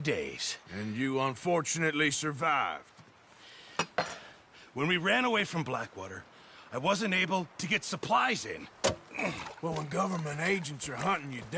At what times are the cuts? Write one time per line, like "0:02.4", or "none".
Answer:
none